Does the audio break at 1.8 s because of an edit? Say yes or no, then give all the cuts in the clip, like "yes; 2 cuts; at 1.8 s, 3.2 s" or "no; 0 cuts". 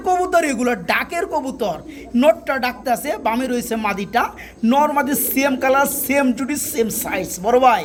no; 0 cuts